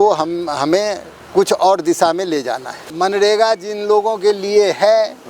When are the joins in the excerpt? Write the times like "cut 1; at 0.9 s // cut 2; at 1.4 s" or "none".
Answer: cut 1; at 2.8 s